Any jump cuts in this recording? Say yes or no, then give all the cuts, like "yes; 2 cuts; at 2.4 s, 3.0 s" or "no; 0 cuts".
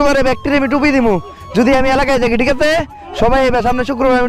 no; 0 cuts